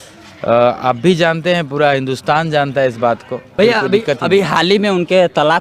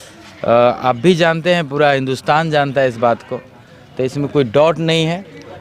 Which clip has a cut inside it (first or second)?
first